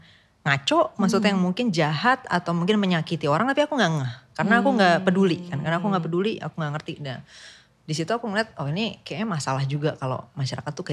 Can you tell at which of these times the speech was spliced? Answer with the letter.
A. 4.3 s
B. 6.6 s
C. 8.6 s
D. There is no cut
D